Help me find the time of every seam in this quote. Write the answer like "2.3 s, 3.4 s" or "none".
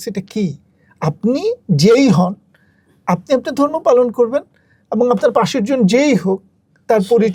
none